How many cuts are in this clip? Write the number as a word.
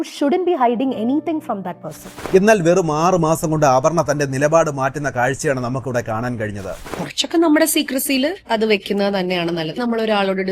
two